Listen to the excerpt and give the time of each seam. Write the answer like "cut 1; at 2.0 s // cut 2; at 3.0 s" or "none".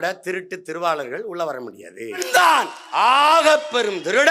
cut 1; at 2.2 s